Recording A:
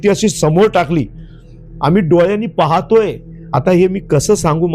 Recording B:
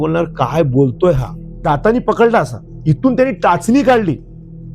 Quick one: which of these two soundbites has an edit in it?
B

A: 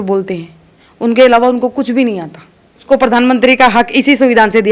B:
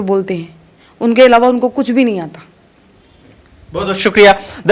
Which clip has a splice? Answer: A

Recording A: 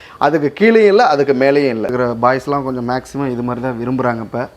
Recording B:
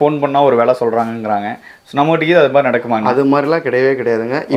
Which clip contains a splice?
A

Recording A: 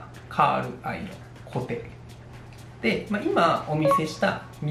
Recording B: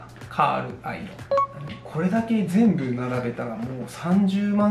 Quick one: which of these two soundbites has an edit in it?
B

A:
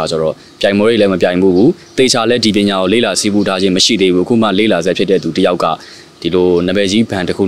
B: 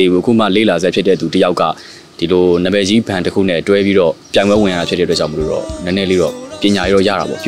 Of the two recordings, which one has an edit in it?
B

